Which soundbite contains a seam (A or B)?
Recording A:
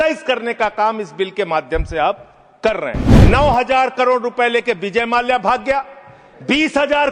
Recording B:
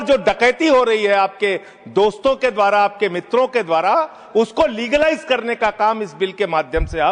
A